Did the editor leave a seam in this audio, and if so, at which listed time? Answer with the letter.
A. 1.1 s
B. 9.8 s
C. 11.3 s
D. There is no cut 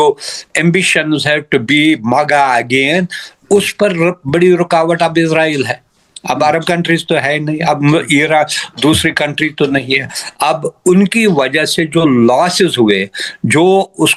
D